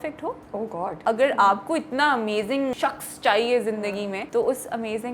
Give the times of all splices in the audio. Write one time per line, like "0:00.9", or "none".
0:00.9
0:02.7
0:04.2

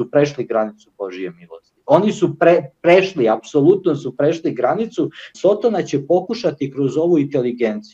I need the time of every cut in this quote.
0:05.3

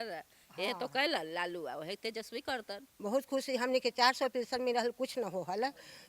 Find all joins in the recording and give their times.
0:02.8

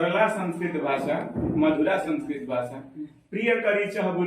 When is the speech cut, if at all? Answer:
none

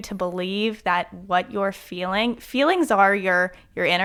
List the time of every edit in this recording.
none

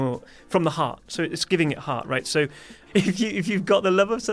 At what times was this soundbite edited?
0:02.8

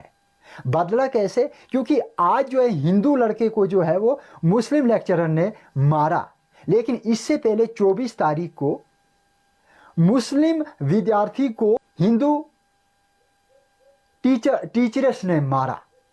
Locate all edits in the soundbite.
0:11.9

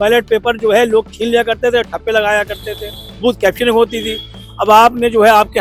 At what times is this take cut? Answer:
none

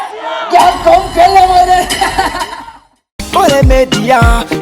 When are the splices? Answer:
0:02.5

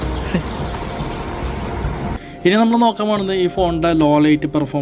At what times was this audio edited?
0:02.2

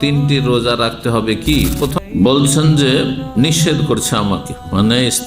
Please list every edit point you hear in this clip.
0:02.0

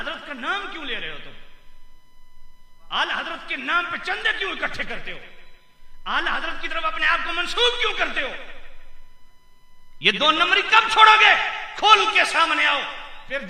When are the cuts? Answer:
none

